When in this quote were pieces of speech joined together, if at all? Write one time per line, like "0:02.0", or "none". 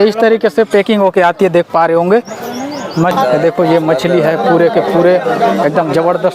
0:03.1